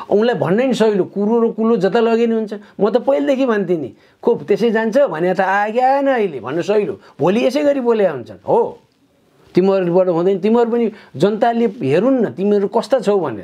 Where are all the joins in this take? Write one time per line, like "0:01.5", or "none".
none